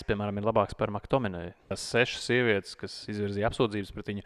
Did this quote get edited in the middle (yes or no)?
yes